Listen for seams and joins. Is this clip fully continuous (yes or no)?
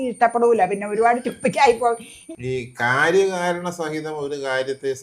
no